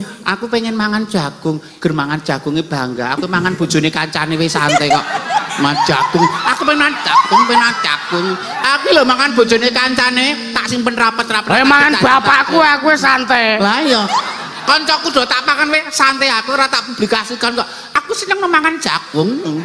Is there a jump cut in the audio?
no; 0 cuts

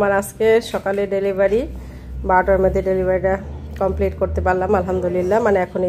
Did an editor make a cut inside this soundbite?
no; 0 cuts

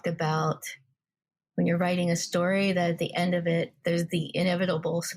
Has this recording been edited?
yes; 1 cut; at 3.8 s

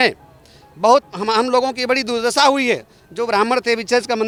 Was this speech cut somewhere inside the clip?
no; 0 cuts

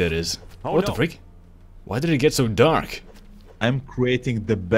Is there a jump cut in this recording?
no; 0 cuts

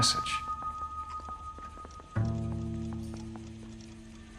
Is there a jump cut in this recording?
no; 0 cuts

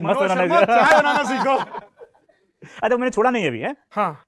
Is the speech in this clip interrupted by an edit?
no; 0 cuts

